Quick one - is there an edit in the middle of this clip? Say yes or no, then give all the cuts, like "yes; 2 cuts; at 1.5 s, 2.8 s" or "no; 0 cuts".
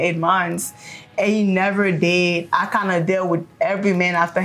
no; 0 cuts